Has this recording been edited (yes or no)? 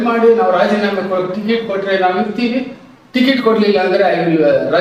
no